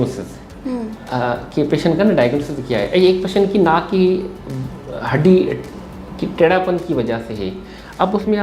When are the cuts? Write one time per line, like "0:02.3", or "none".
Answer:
none